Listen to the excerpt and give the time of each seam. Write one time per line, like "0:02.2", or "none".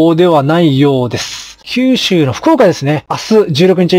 0:01.6
0:03.1